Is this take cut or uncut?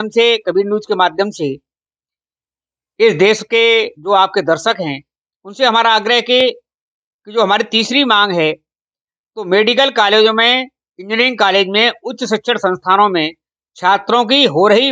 uncut